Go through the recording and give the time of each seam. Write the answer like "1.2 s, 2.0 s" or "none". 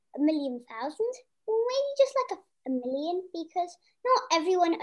1.3 s, 2.5 s